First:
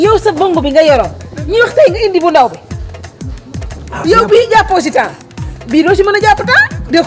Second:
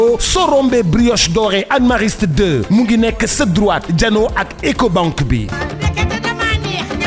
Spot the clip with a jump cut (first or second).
second